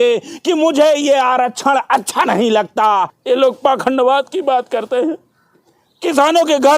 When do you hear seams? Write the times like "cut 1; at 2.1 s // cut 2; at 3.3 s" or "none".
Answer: cut 1; at 3.2 s